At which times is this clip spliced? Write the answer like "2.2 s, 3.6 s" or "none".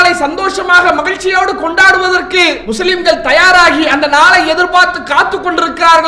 2.6 s